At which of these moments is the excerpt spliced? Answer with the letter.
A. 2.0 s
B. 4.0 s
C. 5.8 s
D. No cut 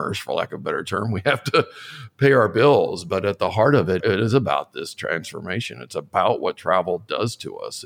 B